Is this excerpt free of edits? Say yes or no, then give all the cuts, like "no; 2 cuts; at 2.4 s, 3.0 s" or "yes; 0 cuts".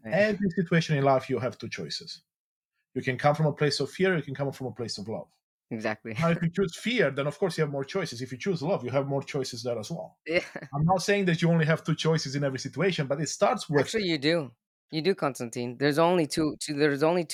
yes; 0 cuts